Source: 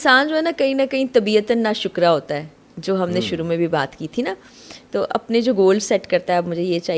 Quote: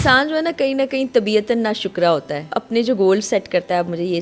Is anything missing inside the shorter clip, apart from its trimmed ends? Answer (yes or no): yes